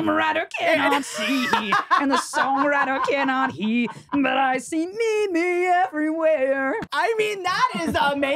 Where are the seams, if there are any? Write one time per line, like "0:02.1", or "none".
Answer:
0:06.9